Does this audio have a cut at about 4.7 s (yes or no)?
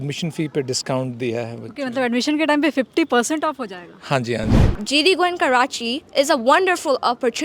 yes